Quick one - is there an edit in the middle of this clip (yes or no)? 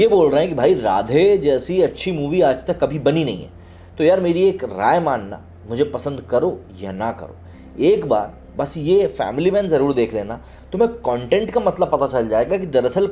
no